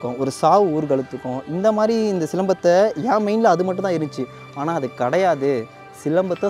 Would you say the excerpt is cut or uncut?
uncut